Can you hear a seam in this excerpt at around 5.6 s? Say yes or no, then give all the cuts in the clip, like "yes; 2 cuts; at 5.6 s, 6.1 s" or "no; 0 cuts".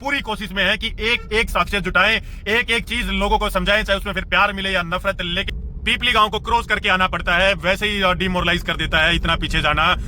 yes; 1 cut; at 5.6 s